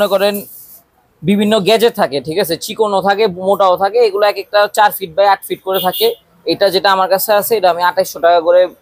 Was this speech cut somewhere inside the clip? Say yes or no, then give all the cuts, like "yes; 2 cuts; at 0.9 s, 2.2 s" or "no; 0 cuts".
no; 0 cuts